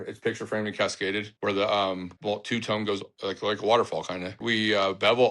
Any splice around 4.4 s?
yes; 4 cuts; at 1.3 s, 2.1 s, 3.1 s, 4.4 s

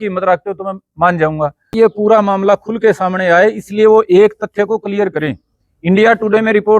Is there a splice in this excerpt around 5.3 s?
no; 1 cut; at 1.7 s

